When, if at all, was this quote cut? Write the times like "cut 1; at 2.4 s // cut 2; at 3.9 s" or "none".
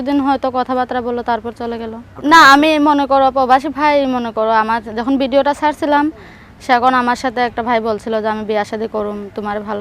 cut 1; at 2.0 s